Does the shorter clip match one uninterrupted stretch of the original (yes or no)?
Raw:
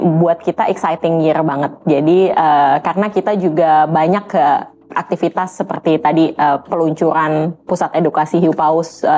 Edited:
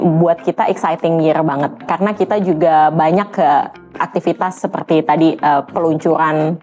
no